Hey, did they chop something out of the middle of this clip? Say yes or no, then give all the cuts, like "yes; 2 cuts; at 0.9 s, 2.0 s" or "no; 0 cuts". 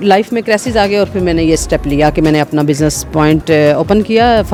no; 0 cuts